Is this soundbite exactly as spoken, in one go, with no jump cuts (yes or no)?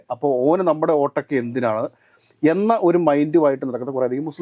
yes